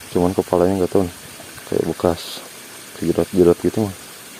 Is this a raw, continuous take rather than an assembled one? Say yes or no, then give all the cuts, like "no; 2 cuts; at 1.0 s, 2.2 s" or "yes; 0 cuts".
yes; 0 cuts